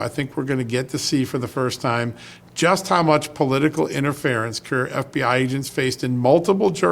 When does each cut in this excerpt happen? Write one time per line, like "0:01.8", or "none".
none